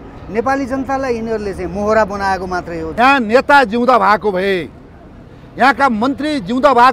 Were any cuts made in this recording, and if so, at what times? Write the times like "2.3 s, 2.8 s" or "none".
2.8 s